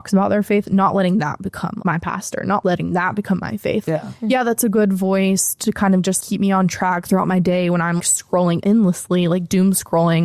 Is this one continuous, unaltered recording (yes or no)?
no